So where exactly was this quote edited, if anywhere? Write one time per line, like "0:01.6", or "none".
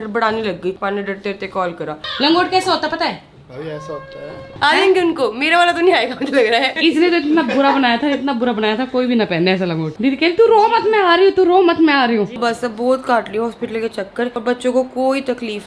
0:00.8
0:02.0
0:04.5
0:06.7
0:09.9
0:12.3
0:14.4